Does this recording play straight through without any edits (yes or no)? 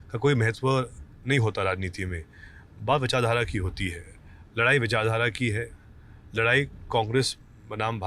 yes